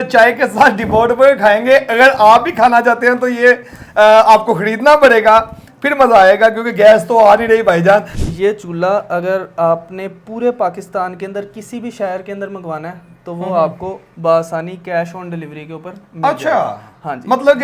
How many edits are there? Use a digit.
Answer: 1